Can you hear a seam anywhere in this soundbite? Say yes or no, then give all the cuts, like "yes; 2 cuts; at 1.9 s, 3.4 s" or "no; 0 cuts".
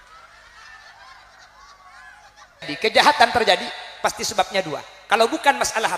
yes; 1 cut; at 2.7 s